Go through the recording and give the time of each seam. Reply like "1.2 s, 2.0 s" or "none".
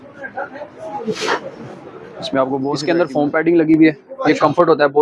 2.8 s